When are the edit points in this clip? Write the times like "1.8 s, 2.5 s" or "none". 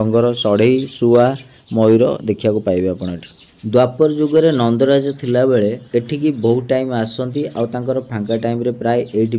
none